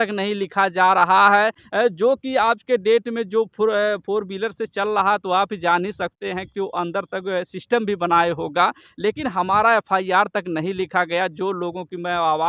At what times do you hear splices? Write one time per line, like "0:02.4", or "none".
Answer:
none